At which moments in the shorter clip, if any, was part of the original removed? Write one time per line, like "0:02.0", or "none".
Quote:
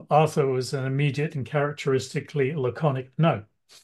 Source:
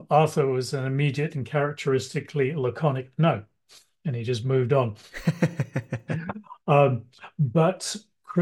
none